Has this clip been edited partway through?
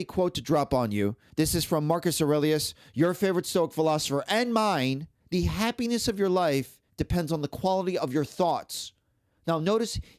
yes; 2 cuts; at 1.2 s, 5.1 s

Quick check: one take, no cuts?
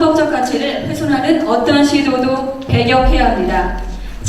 no; 1 cut; at 1.4 s

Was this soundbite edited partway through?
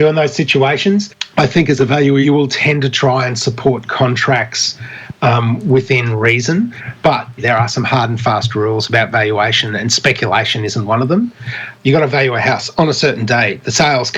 yes; 4 cuts; at 1.2 s, 2.2 s, 7.4 s, 11.6 s

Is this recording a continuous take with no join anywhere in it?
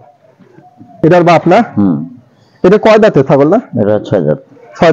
no; 1 cut; at 1.0 s

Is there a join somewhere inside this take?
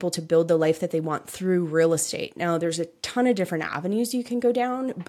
no; 0 cuts

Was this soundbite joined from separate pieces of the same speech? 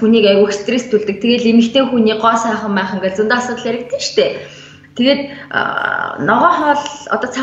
no; 0 cuts

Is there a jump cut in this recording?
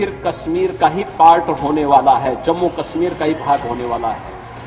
no; 0 cuts

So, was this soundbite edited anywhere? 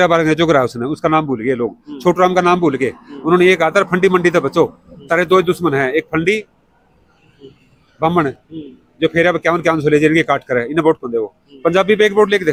no; 0 cuts

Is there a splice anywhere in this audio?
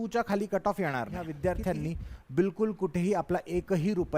yes; 1 cut; at 1.2 s

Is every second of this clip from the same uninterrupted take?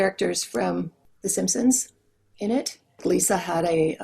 no; 1 cut; at 3.0 s

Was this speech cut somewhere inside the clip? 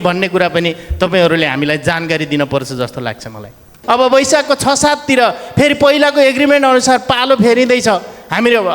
yes; 1 cut; at 3.7 s

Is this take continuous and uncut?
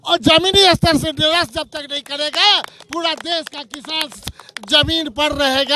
yes; 0 cuts

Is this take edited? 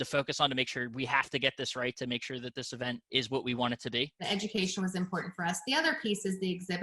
yes; 2 cuts; at 3.0 s, 4.2 s

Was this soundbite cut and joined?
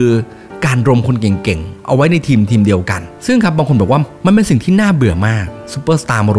yes; 1 cut; at 3.1 s

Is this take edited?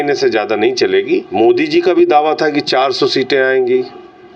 yes; 1 cut; at 1.3 s

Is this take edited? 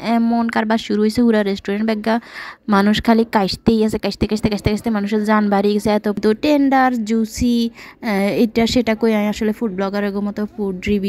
yes; 1 cut; at 6.2 s

